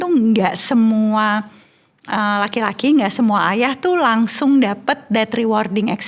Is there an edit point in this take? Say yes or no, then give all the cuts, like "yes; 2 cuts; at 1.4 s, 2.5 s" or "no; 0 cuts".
no; 0 cuts